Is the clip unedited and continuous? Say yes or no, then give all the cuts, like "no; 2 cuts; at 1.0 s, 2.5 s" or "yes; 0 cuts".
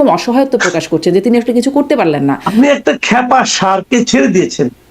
no; 1 cut; at 2.5 s